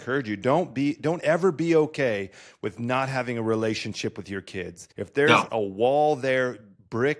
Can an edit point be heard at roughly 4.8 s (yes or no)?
yes